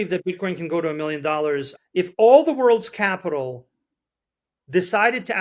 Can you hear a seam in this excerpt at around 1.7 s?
yes; 1 cut; at 1.7 s

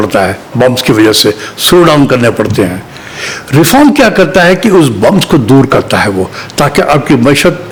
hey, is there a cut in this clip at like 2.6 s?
no; 0 cuts

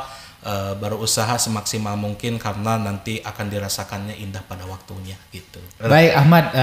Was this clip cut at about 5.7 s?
yes; 1 cut; at 5.7 s

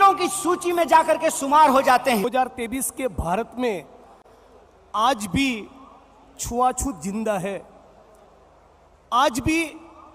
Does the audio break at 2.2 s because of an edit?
yes; 1 cut; at 2.2 s

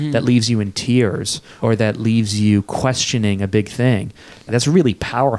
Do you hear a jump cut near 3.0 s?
no; 2 cuts; at 1.5 s, 4.5 s

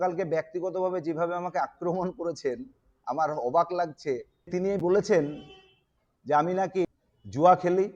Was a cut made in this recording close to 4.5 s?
yes; 2 cuts; at 4.5 s, 6.9 s

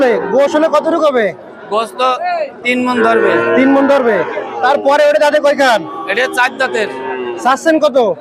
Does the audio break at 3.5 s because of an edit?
no; 0 cuts

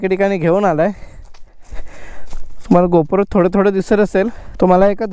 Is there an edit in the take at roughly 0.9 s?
no; 0 cuts

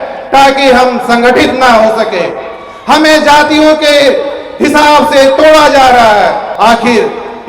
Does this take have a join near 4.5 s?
no; 1 cut; at 6.5 s

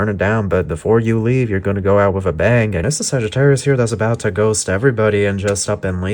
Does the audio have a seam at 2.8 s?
yes; 1 cut; at 2.8 s

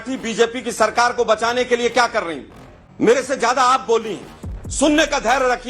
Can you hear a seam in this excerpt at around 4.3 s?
no; 1 cut; at 3.0 s

